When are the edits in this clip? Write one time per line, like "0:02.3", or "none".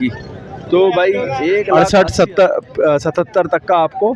0:01.7